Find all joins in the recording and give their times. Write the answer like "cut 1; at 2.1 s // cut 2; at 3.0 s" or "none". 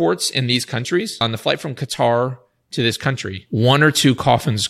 cut 1; at 1.2 s // cut 2; at 3.3 s